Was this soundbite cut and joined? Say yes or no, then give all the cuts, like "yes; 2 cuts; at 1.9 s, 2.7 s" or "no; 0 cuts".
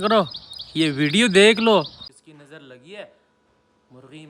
yes; 1 cut; at 2.1 s